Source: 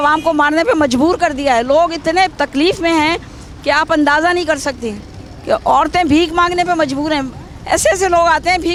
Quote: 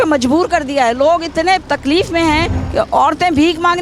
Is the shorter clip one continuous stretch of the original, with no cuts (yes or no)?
no